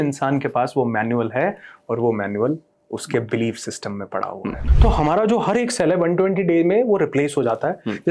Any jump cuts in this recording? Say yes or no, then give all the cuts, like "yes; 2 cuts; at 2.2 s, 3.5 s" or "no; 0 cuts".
yes; 1 cut; at 4.6 s